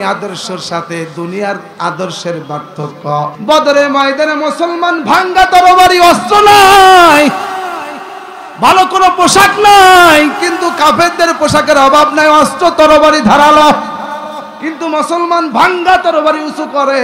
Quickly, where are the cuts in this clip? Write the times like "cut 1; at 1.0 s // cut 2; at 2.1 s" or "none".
cut 1; at 3.4 s